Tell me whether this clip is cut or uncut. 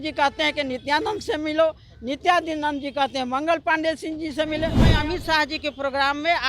cut